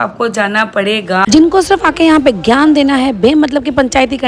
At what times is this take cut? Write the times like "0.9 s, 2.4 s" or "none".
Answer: 1.2 s